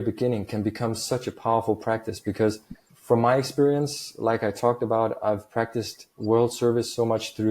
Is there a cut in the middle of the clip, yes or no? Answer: yes